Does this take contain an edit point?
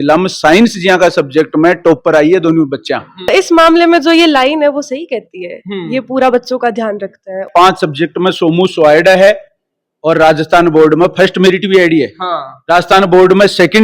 yes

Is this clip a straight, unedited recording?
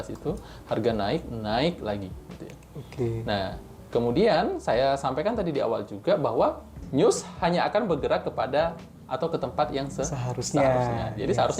no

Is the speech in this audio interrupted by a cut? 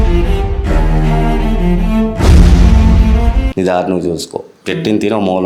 yes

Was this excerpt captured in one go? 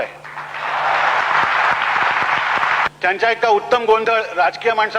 no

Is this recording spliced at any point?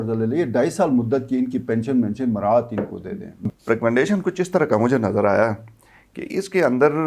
yes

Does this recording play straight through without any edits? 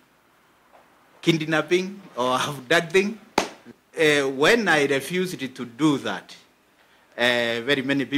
no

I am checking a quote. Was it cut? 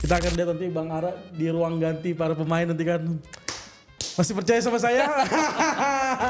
no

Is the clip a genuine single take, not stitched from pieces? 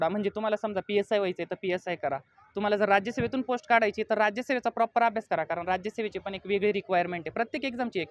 yes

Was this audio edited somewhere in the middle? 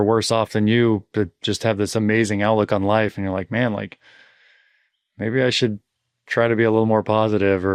no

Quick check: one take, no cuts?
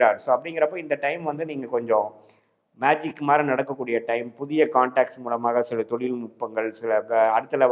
yes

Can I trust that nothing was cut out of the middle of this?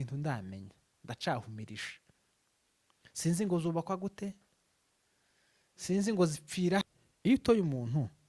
no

